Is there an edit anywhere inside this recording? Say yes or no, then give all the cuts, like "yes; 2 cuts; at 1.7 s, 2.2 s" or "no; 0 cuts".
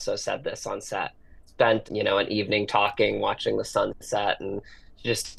no; 0 cuts